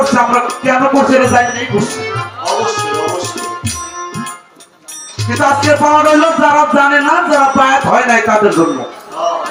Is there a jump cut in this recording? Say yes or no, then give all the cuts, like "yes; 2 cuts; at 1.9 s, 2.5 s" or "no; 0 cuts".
no; 0 cuts